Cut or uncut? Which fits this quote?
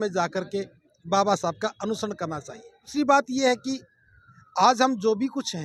cut